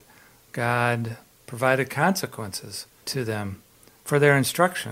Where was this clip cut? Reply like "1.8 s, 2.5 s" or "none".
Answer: 3.0 s